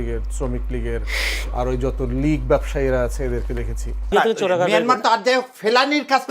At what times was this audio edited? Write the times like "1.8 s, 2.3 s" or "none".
4.1 s